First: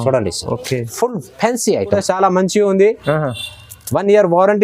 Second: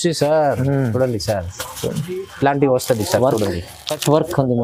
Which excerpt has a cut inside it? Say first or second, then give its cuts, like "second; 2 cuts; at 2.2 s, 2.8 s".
first; 1 cut; at 2.0 s